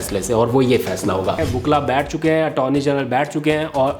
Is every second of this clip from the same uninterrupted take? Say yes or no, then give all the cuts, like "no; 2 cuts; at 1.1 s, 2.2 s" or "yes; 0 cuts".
no; 1 cut; at 1.4 s